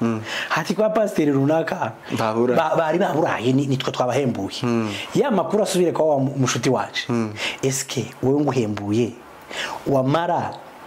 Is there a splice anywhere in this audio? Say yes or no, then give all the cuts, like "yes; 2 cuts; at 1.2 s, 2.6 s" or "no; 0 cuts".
no; 0 cuts